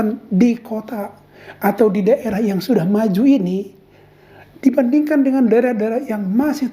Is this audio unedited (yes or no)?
yes